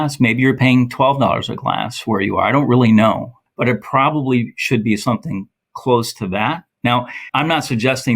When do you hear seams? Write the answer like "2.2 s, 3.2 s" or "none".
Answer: 3.3 s, 7.2 s